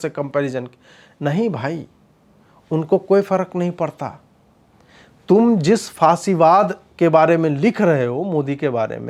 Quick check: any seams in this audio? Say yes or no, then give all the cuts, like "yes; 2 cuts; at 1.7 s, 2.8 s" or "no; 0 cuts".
no; 0 cuts